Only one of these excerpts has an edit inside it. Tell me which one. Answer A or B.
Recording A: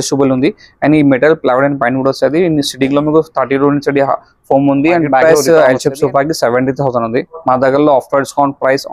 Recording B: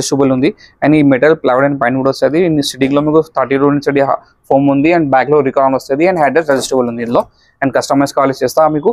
A